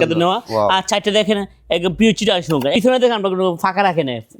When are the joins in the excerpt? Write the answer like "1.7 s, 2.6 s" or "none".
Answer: 2.7 s